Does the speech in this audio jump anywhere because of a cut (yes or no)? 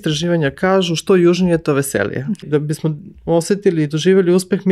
yes